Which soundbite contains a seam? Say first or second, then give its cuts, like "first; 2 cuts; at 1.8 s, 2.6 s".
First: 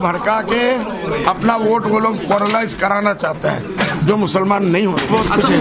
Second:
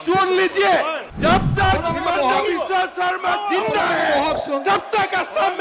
second; 1 cut; at 1.0 s